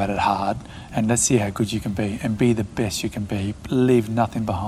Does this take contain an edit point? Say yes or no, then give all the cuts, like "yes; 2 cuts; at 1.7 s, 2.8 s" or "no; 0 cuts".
no; 0 cuts